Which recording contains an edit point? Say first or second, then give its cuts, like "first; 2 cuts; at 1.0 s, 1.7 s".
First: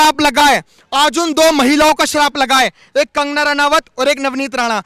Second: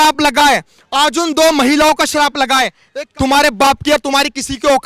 second; 1 cut; at 2.8 s